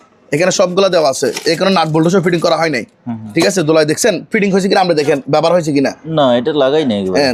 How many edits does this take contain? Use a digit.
0